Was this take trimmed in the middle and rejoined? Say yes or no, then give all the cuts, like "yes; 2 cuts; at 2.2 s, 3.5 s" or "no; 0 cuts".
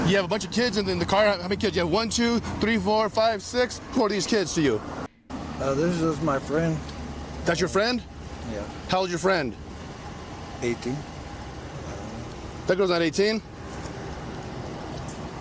no; 0 cuts